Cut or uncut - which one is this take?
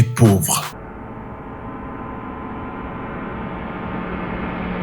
uncut